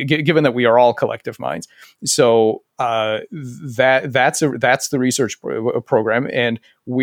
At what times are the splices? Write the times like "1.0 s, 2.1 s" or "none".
none